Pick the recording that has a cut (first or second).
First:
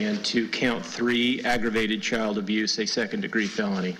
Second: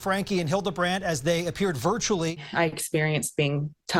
second